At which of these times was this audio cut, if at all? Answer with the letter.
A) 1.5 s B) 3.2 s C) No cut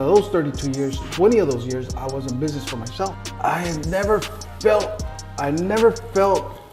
B